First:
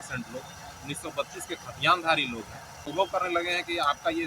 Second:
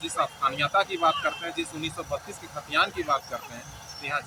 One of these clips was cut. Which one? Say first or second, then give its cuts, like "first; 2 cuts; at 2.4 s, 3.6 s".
first; 1 cut; at 2.7 s